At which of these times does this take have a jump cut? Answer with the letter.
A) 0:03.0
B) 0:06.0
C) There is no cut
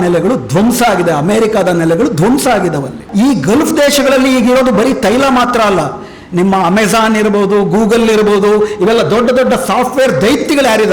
A